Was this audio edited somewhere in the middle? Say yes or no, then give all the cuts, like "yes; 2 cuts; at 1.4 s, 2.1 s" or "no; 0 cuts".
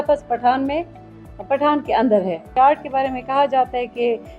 yes; 1 cut; at 2.4 s